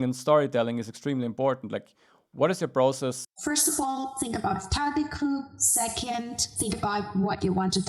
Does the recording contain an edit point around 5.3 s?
no; 1 cut; at 3.3 s

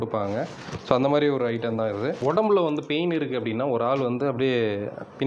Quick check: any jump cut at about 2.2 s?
yes; 1 cut; at 2.2 s

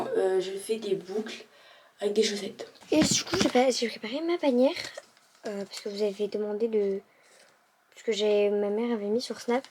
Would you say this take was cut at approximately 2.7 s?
yes; 1 cut; at 2.7 s

